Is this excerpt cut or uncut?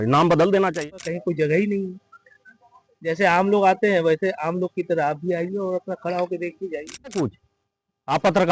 cut